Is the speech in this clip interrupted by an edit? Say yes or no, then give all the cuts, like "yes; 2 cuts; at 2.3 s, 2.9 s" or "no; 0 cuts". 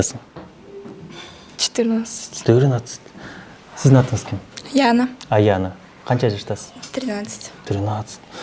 no; 0 cuts